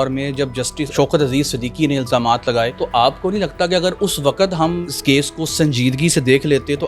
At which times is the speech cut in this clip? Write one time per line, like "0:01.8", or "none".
0:00.9
0:02.8
0:04.8